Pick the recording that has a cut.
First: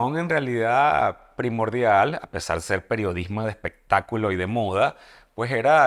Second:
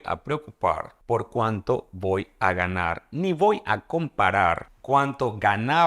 second; 2 cuts; at 0.9 s, 4.7 s

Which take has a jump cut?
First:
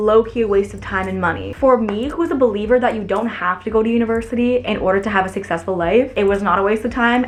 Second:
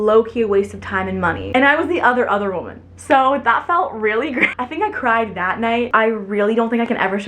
second; 3 cuts; at 1.5 s, 4.6 s, 5.9 s

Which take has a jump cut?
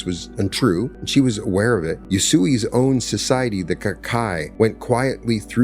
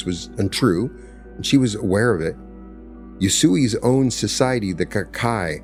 first; 3 cuts; at 1.0 s, 2.0 s, 4.5 s

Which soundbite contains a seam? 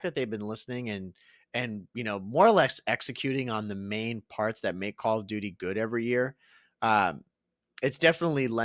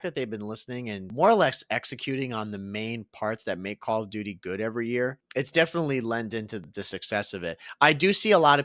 second; 3 cuts; at 1.1 s, 5.2 s, 6.6 s

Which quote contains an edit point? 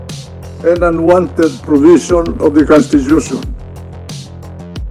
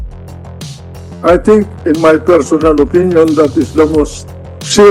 second; 1 cut; at 1.2 s

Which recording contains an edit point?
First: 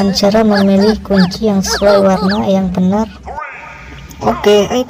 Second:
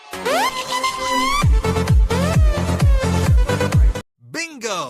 second; 1 cut; at 4.0 s

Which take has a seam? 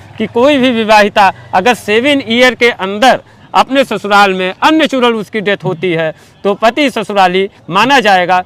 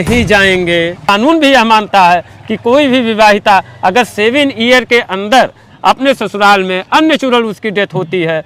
second; 1 cut; at 1.1 s

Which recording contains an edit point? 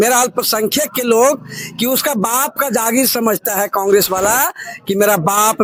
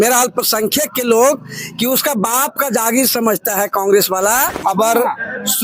second; 1 cut; at 4.5 s

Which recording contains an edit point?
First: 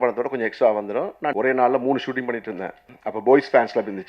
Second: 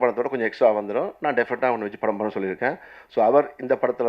first; 2 cuts; at 1.3 s, 2.9 s

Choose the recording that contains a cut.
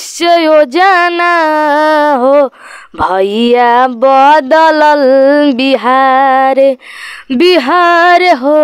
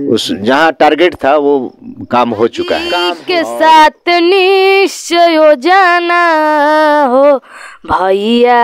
second; 1 cut; at 3.1 s

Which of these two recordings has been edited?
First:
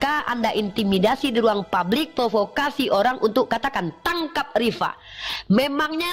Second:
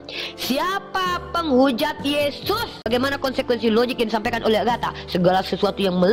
second; 1 cut; at 2.9 s

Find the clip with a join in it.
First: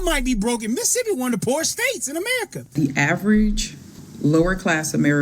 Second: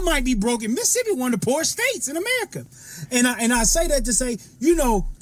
first; 1 cut; at 2.7 s

